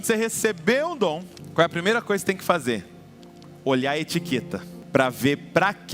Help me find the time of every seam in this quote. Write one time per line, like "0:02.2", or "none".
0:01.4
0:04.7